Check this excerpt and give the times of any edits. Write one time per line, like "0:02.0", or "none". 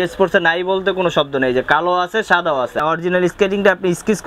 0:02.7